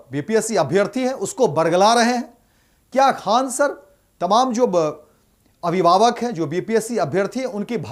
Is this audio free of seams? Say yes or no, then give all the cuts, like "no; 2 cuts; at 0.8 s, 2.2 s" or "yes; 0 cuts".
yes; 0 cuts